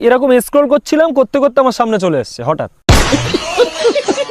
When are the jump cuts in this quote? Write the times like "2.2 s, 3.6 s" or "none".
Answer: 2.7 s

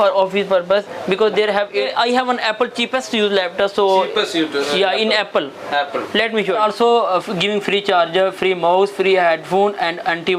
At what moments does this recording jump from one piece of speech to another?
1.7 s, 6.5 s

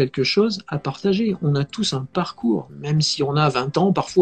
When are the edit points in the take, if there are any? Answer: 2.7 s

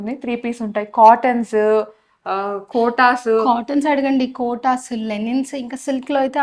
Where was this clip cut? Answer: none

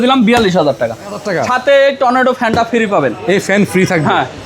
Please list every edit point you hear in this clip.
1.2 s

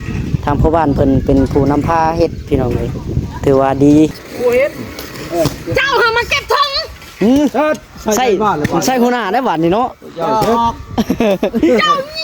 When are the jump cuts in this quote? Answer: 4.2 s

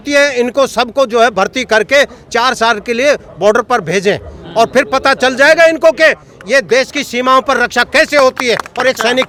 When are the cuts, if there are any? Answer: none

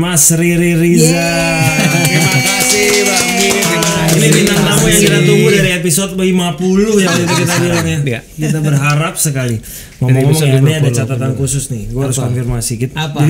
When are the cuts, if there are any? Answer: none

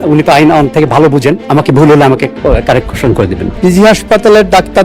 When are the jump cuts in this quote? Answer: 1.4 s, 3.4 s

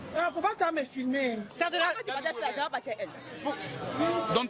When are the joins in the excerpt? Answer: 1.5 s

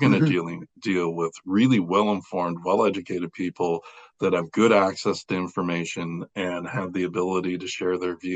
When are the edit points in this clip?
none

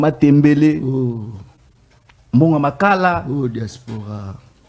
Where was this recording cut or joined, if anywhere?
none

